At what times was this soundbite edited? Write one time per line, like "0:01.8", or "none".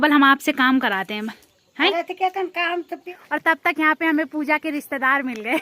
0:03.1